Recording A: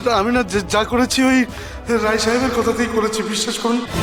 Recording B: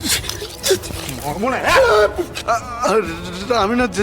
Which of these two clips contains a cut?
B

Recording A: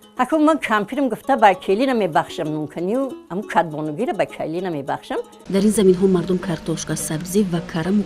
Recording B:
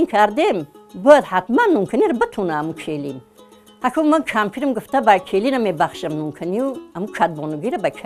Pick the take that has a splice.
A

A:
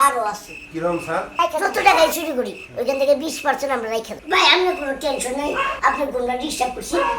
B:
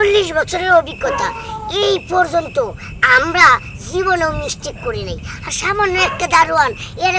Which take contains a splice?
A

